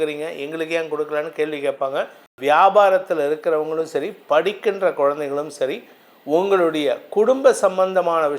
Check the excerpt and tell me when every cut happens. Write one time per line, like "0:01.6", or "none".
0:02.2